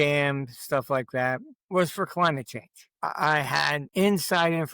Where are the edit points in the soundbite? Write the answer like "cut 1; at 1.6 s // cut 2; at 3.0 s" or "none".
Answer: cut 1; at 1.5 s // cut 2; at 2.9 s // cut 3; at 3.9 s